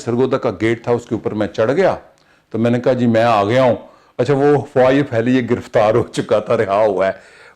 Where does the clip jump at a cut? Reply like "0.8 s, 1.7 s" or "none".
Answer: none